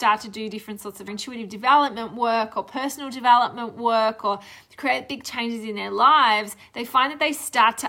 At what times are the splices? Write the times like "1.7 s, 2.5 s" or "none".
1.1 s

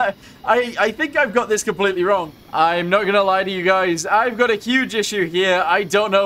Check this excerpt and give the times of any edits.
2.3 s

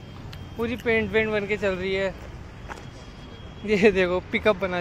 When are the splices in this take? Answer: none

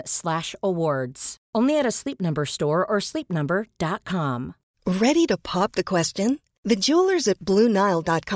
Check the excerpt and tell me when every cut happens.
4.6 s

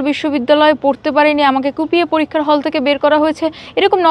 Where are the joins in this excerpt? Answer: none

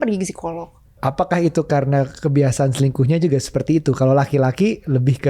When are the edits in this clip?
0.9 s

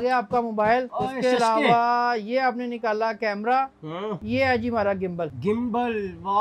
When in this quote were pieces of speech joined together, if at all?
0.9 s, 4.2 s, 5.3 s

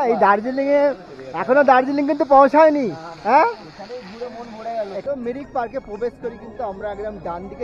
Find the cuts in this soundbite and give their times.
5.0 s

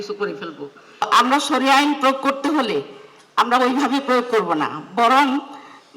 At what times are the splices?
1.0 s

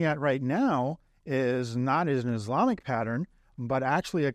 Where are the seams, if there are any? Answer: none

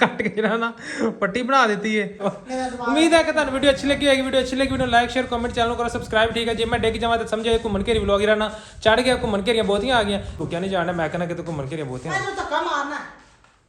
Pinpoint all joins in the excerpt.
2.3 s, 10.4 s

